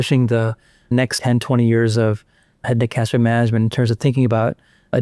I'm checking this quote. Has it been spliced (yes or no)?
yes